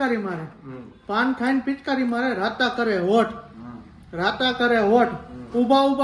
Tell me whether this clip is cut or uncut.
uncut